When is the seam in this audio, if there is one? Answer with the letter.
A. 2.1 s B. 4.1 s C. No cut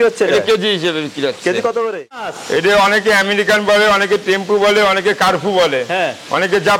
A